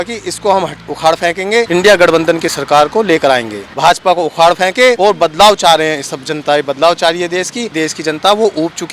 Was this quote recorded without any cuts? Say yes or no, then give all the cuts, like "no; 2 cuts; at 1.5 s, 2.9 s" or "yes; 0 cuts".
no; 4 cuts; at 1.7 s, 3.6 s, 5.0 s, 7.7 s